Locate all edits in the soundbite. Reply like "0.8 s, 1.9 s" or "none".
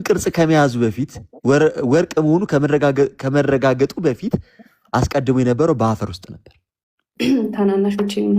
7.1 s